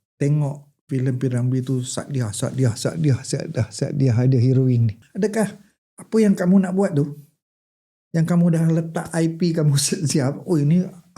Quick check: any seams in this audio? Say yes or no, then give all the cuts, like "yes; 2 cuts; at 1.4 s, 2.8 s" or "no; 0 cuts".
yes; 1 cut; at 5.0 s